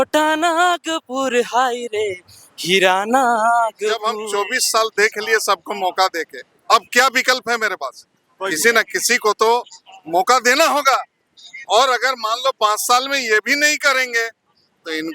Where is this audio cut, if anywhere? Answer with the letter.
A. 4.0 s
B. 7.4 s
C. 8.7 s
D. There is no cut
A